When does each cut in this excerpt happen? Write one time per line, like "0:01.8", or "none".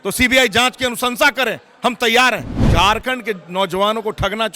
0:02.5